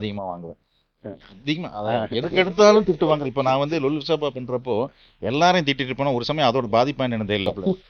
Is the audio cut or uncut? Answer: uncut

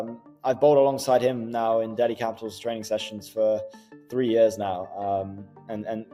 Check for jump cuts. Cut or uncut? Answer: uncut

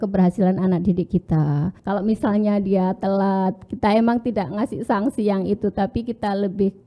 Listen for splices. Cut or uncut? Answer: cut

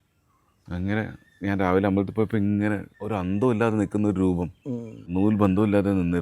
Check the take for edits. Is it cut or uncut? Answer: cut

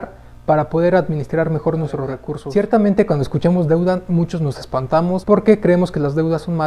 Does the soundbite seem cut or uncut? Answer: cut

